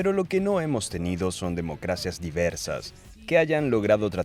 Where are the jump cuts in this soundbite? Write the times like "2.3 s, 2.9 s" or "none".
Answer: 3.0 s